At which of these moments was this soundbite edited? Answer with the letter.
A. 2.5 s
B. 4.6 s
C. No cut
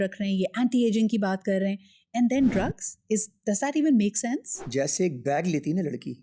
B